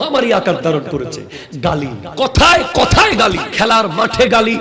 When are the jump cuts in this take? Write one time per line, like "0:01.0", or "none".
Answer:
0:02.1
0:03.5